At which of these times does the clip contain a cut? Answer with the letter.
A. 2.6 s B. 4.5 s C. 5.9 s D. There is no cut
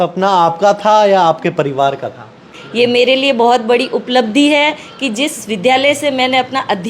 A